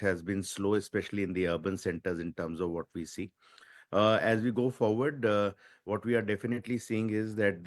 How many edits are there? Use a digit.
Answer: 1